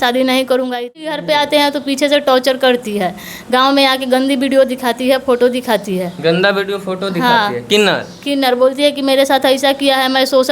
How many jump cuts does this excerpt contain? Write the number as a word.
one